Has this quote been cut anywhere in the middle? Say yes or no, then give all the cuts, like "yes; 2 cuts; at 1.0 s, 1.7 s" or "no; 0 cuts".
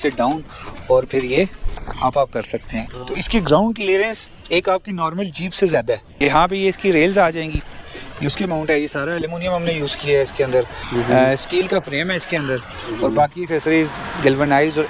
yes; 2 cuts; at 2.9 s, 6.1 s